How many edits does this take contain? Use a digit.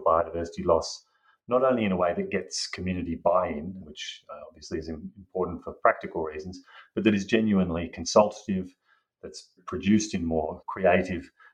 3